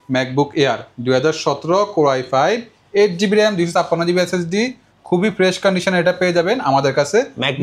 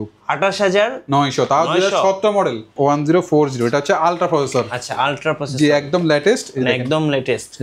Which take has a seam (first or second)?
second